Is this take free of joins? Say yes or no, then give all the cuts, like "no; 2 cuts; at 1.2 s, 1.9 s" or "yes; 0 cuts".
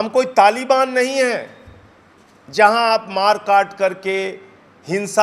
yes; 0 cuts